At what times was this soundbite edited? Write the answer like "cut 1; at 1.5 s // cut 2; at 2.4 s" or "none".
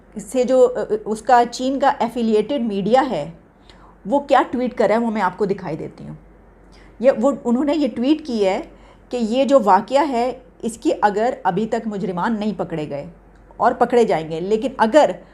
none